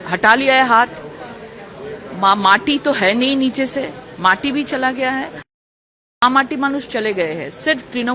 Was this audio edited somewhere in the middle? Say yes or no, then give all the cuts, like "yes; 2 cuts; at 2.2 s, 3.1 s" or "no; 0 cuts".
yes; 1 cut; at 5.6 s